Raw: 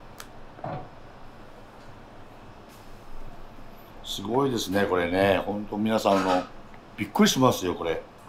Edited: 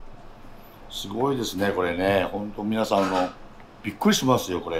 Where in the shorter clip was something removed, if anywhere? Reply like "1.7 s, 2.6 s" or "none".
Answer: none